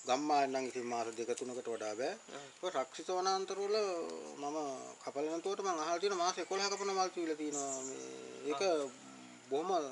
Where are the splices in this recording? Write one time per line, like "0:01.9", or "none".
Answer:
none